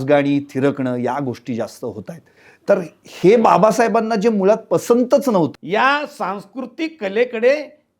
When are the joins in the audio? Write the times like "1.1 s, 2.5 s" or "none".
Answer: 5.5 s